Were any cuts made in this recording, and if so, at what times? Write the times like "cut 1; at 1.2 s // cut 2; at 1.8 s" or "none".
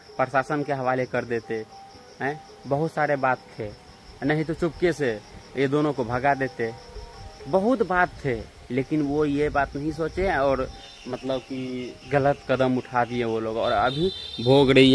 none